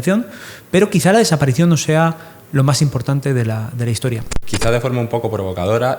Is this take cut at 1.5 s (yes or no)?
no